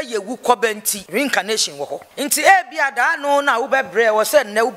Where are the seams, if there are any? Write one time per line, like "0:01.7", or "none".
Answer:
0:00.9
0:02.1